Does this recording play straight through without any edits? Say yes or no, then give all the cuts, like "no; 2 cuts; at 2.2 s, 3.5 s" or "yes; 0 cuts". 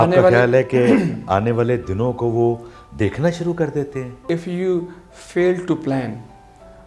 no; 1 cut; at 4.2 s